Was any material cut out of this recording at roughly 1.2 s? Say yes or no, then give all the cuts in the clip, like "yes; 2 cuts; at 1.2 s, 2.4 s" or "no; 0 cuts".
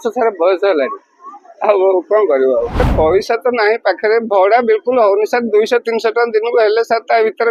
no; 1 cut; at 2.9 s